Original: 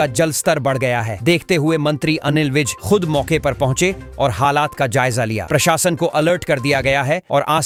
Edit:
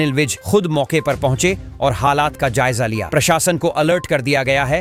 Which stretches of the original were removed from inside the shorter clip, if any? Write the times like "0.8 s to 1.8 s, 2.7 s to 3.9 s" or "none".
none